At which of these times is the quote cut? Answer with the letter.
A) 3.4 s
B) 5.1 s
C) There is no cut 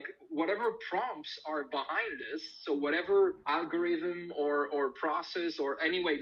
A